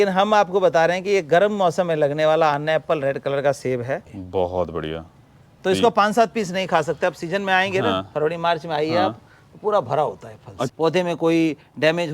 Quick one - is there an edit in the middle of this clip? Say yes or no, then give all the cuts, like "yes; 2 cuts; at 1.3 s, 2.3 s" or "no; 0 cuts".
yes; 2 cuts; at 4.1 s, 10.7 s